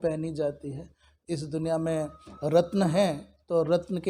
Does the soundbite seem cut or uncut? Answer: cut